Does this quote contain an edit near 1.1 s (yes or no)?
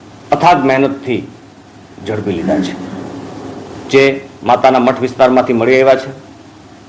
yes